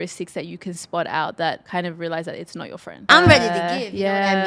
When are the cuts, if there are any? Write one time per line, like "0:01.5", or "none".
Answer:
0:01.6
0:03.1